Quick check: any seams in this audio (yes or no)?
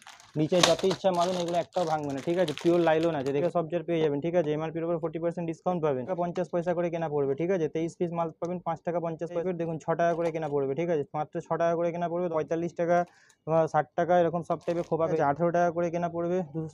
yes